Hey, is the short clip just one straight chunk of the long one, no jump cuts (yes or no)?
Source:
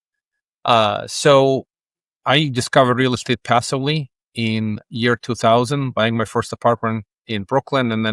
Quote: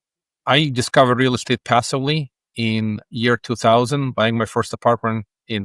yes